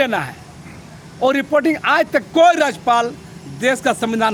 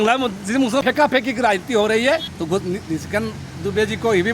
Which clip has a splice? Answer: second; 2 cuts; at 0.8 s, 2.3 s

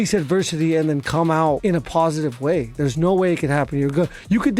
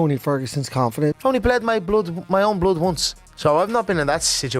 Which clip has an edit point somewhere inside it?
second; 1 cut; at 1.2 s

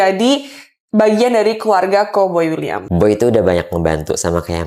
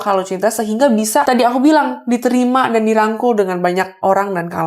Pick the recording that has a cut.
second; 1 cut; at 1.2 s

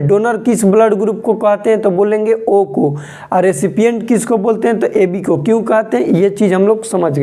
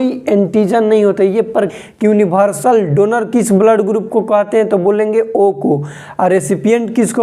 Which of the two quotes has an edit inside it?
second; 1 cut; at 1.7 s

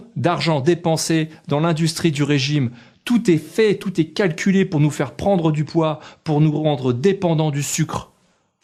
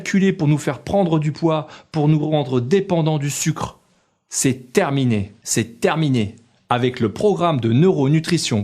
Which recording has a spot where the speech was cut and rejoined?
second; 1 cut; at 5.4 s

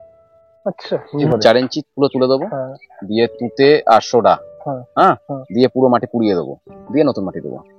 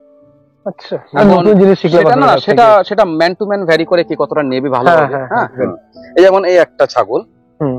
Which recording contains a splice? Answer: first; 1 cut; at 1.1 s

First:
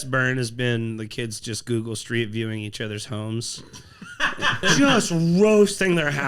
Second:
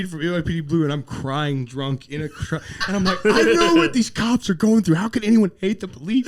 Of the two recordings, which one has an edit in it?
first; 1 cut; at 4.7 s

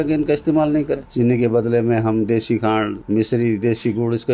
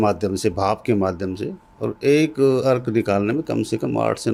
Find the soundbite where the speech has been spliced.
first; 1 cut; at 1.1 s

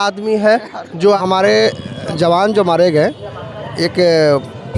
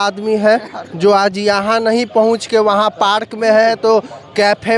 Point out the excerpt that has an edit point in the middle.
first; 1 cut; at 1.2 s

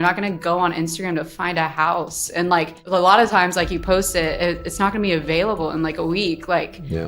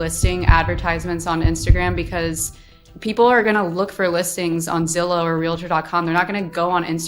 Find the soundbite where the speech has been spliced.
first; 1 cut; at 2.8 s

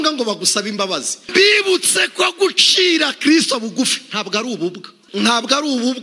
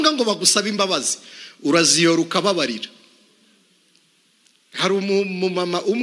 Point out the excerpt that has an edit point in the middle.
first; 1 cut; at 1.2 s

